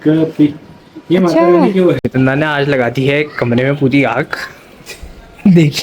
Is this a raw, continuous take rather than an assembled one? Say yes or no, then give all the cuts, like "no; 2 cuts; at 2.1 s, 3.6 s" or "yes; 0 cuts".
no; 1 cut; at 2.0 s